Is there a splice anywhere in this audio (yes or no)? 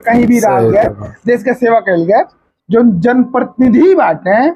yes